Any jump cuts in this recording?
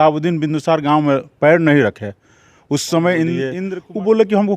yes; 1 cut; at 3.6 s

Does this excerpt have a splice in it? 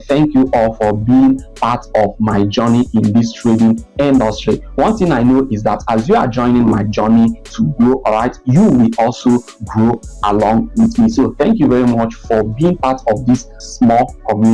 yes; 1 cut; at 13.6 s

